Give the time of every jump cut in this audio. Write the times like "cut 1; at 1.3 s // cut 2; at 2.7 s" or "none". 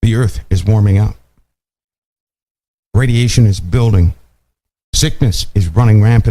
none